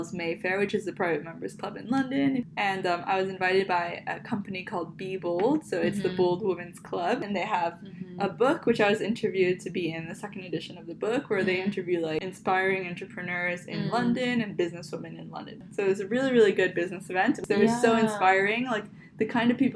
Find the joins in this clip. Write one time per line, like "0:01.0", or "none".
0:02.4
0:07.2
0:12.3
0:15.6
0:17.4